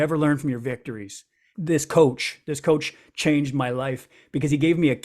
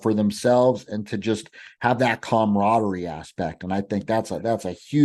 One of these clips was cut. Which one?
first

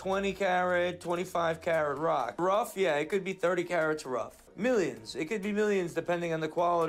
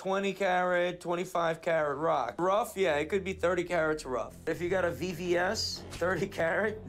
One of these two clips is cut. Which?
second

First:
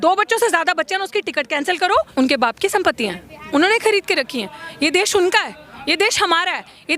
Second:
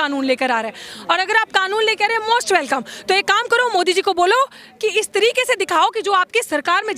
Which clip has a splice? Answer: first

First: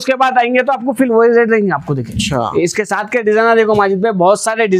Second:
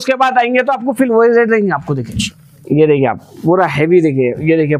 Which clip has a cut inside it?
second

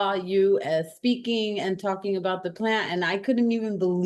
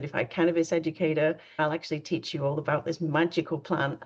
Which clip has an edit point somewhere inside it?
second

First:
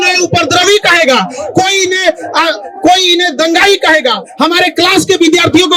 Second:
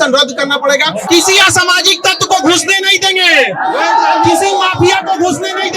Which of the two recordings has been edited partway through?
second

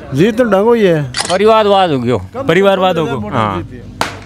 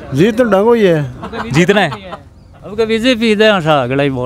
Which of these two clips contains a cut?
first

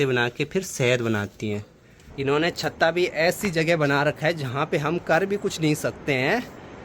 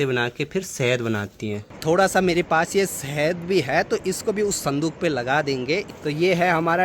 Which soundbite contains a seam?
second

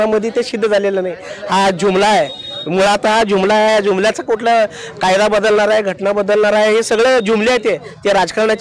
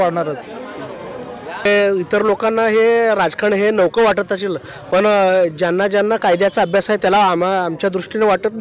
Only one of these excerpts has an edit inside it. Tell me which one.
second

